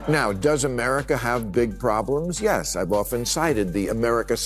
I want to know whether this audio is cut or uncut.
uncut